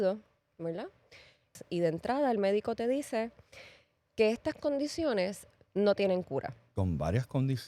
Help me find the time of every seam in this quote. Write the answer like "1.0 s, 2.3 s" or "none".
1.5 s, 6.7 s